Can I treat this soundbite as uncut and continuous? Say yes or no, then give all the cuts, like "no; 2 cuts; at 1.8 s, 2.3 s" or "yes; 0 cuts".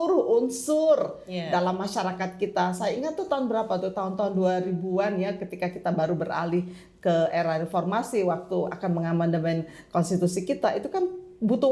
yes; 0 cuts